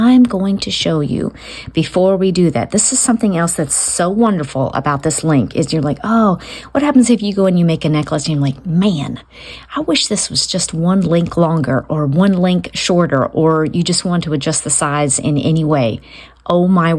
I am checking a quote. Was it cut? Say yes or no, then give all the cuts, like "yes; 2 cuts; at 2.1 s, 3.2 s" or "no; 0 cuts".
no; 0 cuts